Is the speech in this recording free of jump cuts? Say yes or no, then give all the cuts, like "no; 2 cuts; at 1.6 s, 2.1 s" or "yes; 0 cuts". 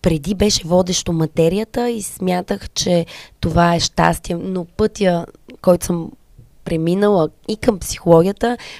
yes; 0 cuts